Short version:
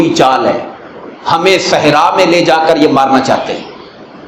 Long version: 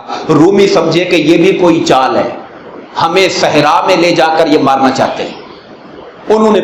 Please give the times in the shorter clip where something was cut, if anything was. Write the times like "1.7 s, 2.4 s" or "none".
none